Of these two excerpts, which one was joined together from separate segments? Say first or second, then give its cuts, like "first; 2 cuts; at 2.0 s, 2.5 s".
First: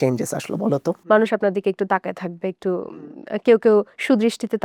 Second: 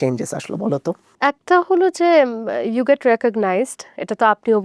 first; 1 cut; at 1.0 s